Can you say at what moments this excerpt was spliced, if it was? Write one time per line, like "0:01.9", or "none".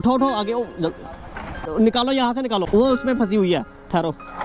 0:01.7
0:02.7